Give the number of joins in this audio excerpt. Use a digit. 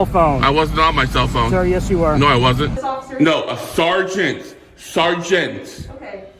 1